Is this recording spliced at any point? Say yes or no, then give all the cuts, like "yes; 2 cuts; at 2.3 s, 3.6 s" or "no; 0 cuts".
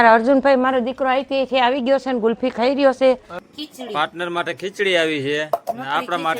yes; 1 cut; at 3.3 s